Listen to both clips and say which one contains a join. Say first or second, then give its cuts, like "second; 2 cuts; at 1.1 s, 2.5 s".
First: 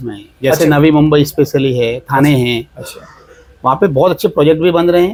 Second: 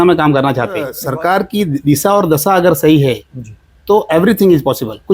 second; 1 cut; at 1.0 s